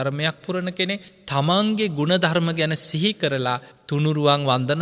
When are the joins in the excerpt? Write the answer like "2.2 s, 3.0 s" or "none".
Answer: 1.1 s, 3.7 s